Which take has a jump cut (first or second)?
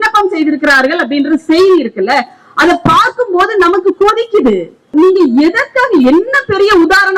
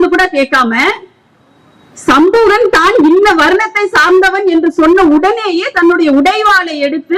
first